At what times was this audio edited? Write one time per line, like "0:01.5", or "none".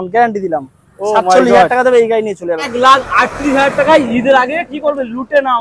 0:02.6